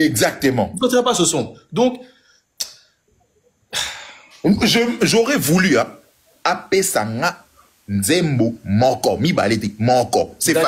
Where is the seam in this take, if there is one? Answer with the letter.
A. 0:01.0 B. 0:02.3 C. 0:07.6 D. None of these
D